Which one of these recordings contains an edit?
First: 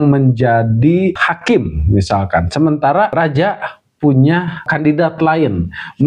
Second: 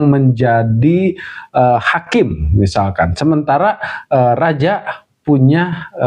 first; 3 cuts; at 1.3 s, 3.1 s, 4.7 s

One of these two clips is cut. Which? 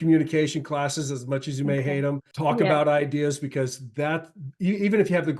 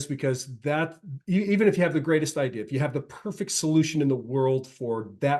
first; 1 cut; at 2.3 s

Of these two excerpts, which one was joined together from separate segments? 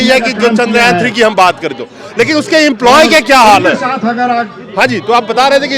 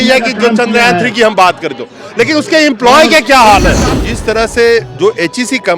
second; 1 cut; at 3.9 s

